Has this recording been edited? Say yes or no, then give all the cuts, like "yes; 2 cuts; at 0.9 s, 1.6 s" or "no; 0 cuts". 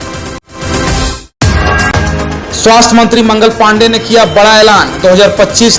yes; 1 cut; at 1.2 s